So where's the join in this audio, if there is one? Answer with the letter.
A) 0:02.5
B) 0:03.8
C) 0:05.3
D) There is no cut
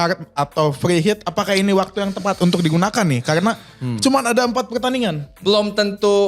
C